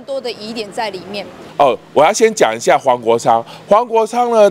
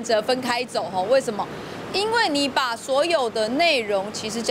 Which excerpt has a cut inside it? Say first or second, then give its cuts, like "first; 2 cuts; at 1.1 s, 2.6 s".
first; 1 cut; at 1.4 s